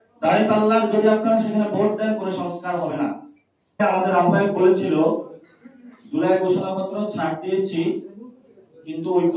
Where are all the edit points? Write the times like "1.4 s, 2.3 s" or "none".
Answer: 3.8 s

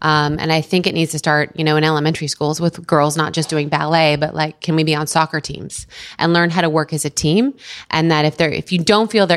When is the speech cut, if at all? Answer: none

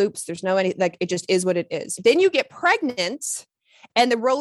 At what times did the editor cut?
2.0 s

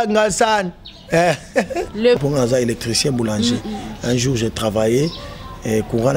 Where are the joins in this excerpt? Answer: 2.2 s

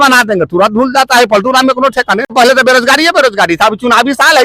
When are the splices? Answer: 2.3 s

